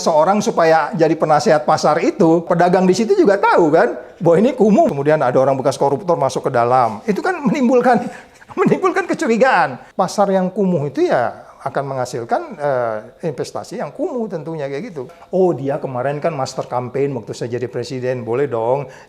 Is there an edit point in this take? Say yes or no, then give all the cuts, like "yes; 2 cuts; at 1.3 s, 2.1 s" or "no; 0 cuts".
yes; 4 cuts; at 2.5 s, 4.9 s, 9.8 s, 15.2 s